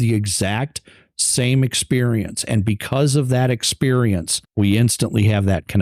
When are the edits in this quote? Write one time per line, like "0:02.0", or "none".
0:04.4

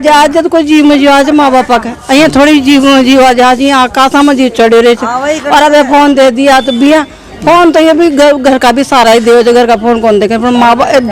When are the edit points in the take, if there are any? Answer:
none

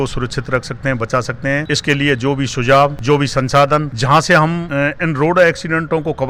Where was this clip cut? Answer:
none

